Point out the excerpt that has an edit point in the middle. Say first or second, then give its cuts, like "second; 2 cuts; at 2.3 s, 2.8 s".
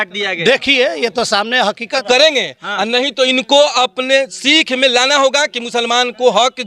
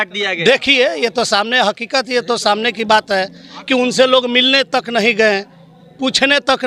first; 1 cut; at 2.0 s